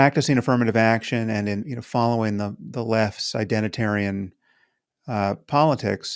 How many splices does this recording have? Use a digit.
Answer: 1